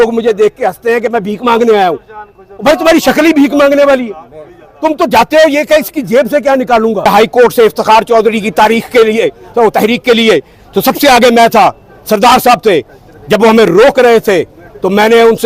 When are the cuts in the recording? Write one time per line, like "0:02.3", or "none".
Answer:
0:07.1

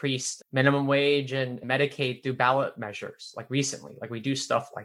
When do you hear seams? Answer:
none

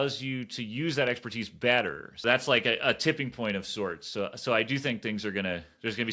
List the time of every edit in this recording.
0:02.2

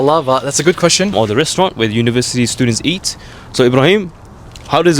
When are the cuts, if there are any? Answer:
0:01.1

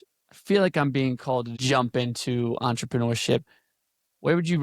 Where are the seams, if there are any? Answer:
0:01.5

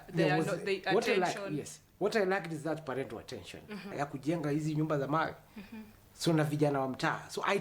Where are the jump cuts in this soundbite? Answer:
0:03.9

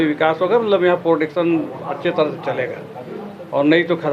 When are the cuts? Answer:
none

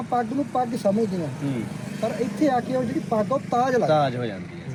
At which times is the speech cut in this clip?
none

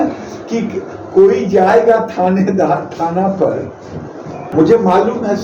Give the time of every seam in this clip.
0:04.4

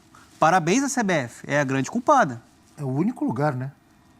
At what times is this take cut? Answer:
none

